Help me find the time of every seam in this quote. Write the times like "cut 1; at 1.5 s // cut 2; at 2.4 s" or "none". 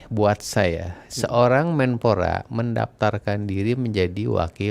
none